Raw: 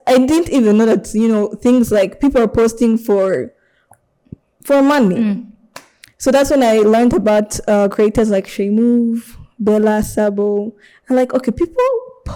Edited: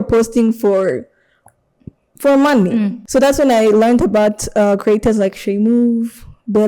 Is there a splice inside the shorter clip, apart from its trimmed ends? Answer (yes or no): yes